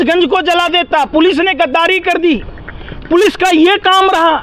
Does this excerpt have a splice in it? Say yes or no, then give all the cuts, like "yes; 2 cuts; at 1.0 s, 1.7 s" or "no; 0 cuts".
no; 0 cuts